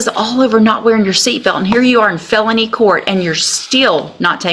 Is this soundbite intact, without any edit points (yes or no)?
yes